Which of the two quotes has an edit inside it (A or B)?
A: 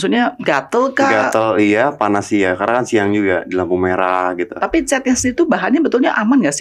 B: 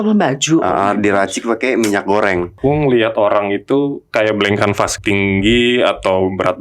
B